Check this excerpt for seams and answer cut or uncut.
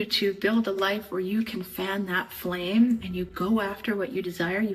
uncut